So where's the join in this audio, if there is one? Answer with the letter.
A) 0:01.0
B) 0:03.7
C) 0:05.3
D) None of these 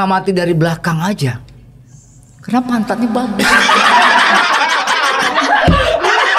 D